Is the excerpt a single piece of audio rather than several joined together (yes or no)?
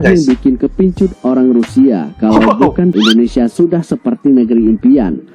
no